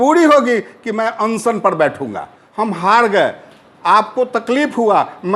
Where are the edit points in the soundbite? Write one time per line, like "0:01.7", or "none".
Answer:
0:02.4